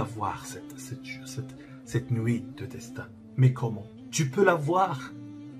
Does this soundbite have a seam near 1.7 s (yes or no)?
no